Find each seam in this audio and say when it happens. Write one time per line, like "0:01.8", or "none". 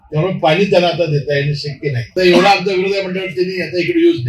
0:02.0

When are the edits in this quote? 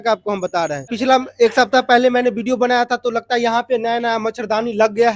0:00.9

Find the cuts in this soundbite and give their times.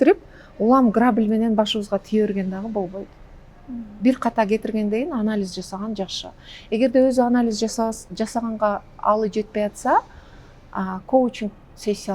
none

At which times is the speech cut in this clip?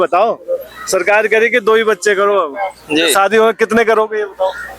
0:03.1

